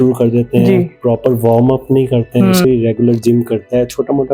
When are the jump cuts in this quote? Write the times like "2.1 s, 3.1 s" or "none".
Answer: 2.6 s